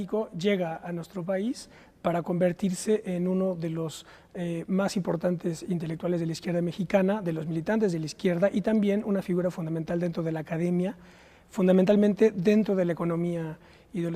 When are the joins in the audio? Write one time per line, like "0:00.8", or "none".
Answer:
none